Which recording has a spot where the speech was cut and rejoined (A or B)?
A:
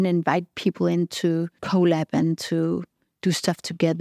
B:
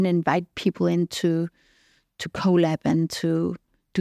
A